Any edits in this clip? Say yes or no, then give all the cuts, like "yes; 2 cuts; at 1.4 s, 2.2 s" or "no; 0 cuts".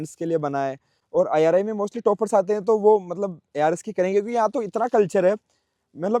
no; 0 cuts